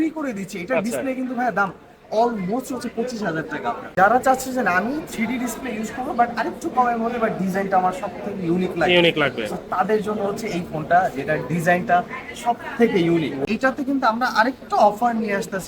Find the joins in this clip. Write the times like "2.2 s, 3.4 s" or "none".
3.8 s, 13.4 s